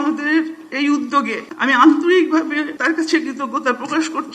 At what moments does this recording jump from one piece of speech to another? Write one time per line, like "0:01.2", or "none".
0:01.4
0:02.7